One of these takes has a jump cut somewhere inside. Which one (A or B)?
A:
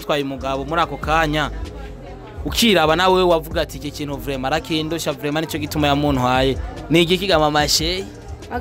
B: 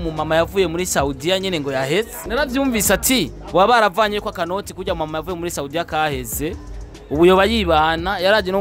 B